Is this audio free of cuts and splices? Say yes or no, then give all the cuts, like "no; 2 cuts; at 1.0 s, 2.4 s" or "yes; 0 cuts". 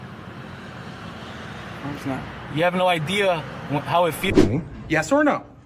no; 1 cut; at 4.3 s